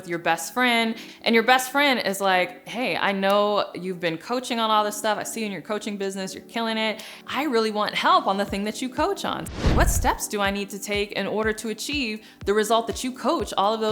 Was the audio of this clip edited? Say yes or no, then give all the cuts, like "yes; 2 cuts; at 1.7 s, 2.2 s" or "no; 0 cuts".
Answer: yes; 3 cuts; at 1.1 s, 7.1 s, 9.7 s